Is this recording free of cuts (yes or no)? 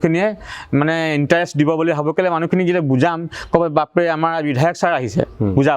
yes